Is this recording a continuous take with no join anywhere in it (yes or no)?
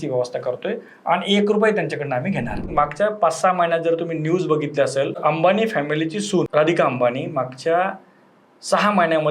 no